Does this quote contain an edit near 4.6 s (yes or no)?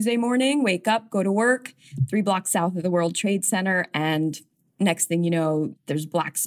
yes